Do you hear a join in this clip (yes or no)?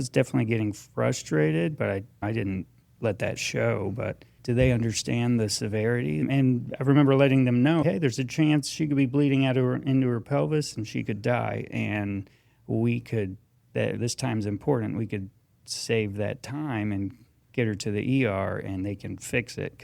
yes